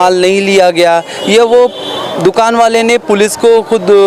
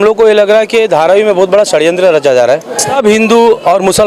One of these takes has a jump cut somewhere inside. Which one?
second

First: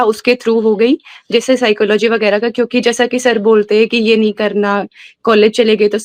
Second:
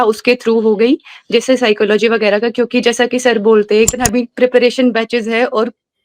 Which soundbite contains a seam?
second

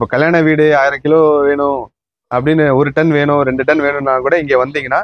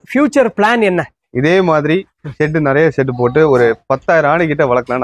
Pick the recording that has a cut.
second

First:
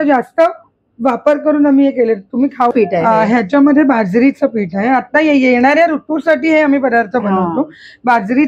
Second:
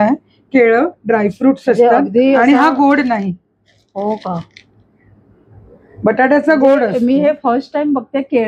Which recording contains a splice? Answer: first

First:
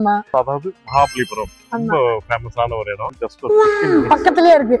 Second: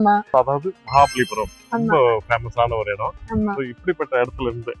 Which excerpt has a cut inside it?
first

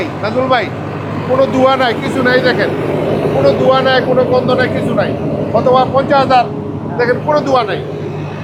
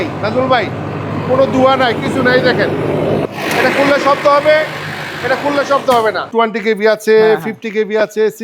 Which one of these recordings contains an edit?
second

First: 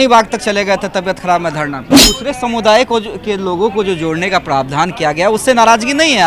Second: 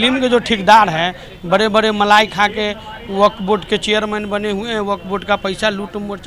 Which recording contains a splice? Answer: first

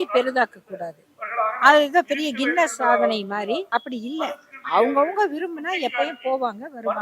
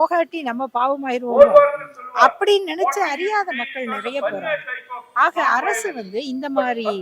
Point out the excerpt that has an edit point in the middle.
first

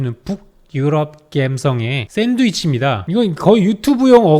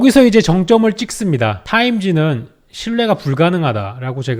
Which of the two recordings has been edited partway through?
first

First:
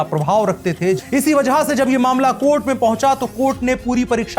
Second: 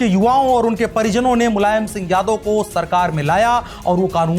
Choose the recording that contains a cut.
first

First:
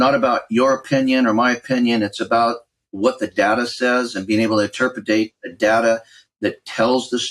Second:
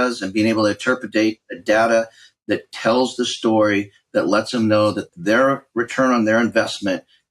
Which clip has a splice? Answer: second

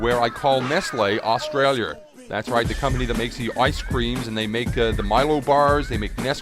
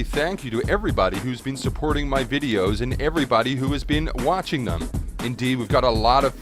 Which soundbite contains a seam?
first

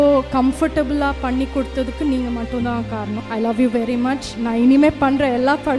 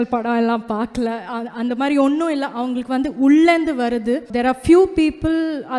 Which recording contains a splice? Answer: first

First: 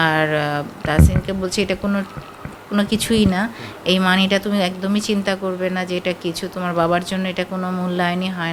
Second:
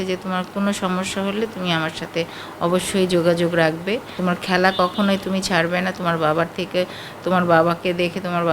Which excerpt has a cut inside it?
second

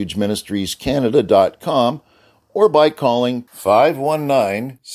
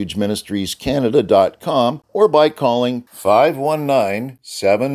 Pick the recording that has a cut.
second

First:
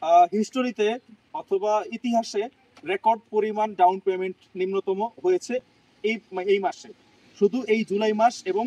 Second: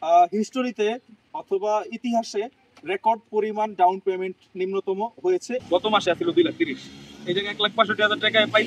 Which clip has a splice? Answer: second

